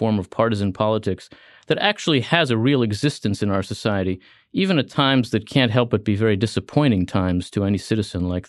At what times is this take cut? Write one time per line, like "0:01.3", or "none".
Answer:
none